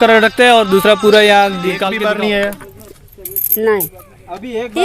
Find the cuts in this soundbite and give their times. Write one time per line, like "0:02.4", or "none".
0:01.9